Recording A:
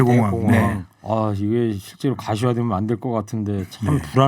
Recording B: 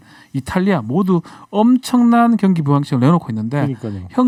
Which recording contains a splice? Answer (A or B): A